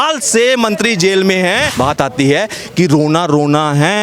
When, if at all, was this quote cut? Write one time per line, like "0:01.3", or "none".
0:01.7